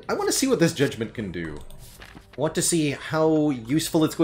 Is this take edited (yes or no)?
no